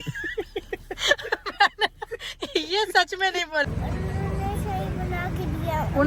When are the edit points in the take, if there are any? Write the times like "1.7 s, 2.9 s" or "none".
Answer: 1.0 s, 3.9 s